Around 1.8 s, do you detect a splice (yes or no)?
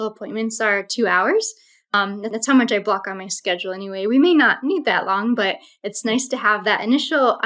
no